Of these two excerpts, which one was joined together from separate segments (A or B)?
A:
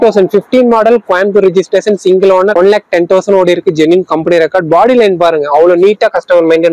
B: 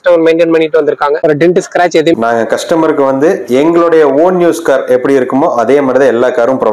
B